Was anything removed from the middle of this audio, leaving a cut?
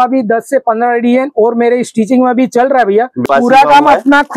yes; 1 cut; at 3.2 s

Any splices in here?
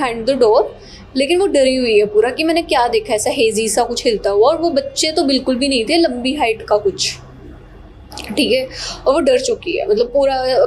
no; 0 cuts

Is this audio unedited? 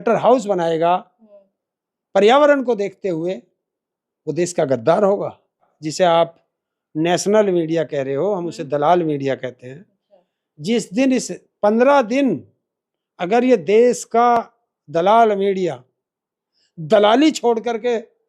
no; 1 cut; at 5.8 s

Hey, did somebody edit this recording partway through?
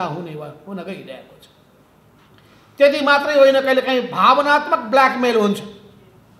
no; 0 cuts

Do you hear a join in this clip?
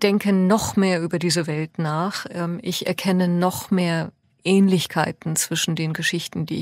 no; 0 cuts

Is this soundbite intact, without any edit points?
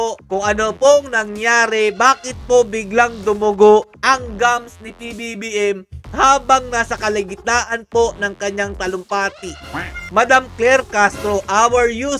no; 1 cut; at 10.0 s

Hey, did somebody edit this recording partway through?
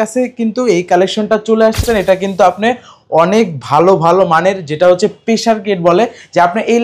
yes; 1 cut; at 1.8 s

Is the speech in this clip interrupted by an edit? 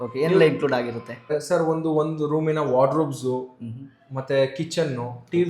yes; 1 cut; at 1.3 s

